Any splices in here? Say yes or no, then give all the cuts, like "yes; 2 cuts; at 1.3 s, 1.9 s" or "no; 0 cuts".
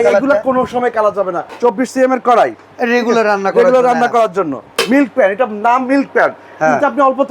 yes; 2 cuts; at 1.4 s, 4.7 s